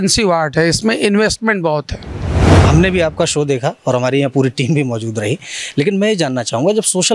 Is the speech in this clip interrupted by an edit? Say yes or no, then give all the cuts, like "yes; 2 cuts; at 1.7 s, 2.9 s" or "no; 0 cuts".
yes; 1 cut; at 2.5 s